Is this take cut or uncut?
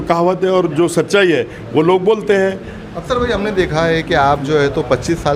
uncut